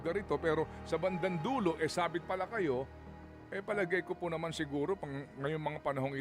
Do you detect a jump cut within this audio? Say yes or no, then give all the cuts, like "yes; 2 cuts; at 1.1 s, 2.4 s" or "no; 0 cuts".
no; 0 cuts